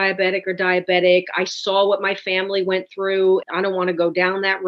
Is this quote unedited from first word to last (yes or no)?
no